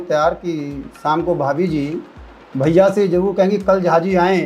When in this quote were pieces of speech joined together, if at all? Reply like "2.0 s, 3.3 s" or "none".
none